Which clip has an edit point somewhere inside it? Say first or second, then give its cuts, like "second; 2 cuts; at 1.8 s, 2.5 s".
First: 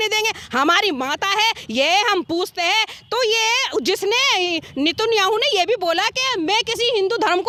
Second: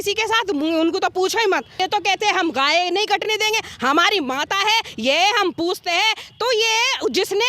second; 1 cut; at 1.8 s